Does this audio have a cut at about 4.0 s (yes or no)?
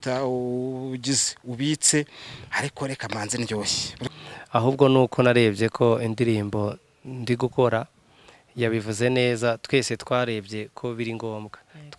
yes